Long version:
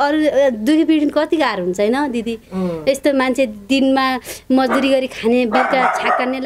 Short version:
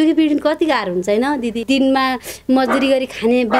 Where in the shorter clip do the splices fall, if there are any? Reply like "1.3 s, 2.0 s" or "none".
1.6 s